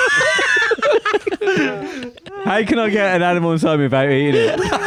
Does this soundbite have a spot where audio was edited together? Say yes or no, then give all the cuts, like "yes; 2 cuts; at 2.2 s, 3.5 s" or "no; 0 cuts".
no; 0 cuts